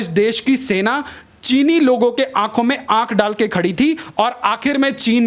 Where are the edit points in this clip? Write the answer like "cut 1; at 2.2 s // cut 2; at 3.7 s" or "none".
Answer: none